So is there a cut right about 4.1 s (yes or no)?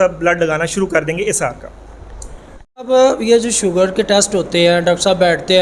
no